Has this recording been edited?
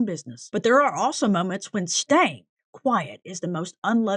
no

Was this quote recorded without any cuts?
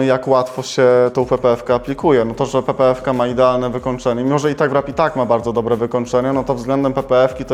yes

